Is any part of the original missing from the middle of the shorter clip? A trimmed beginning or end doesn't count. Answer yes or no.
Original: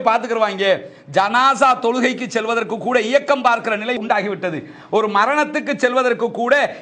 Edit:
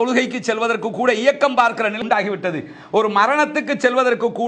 yes